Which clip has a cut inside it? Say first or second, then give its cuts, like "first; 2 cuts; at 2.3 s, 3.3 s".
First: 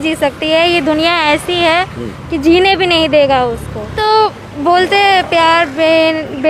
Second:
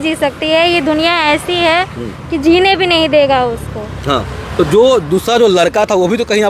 first; 1 cut; at 4.0 s